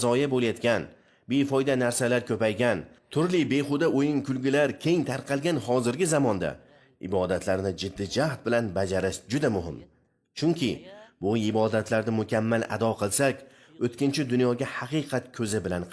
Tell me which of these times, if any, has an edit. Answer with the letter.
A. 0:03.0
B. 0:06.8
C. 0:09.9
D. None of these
D